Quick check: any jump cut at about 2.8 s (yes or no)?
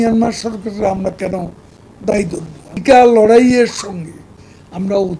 yes